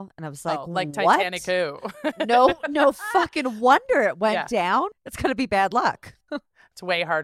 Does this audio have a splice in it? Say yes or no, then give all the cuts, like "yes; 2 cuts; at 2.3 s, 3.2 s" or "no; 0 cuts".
yes; 1 cut; at 4.9 s